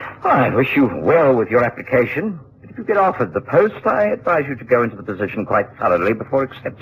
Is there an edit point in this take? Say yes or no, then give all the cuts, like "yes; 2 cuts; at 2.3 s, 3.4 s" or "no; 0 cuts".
yes; 1 cut; at 5.1 s